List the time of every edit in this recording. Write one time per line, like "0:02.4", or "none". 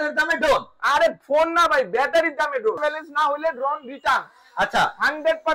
0:02.8